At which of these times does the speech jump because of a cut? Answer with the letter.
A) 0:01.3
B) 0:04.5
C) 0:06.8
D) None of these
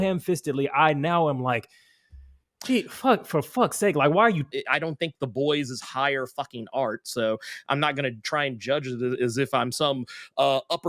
B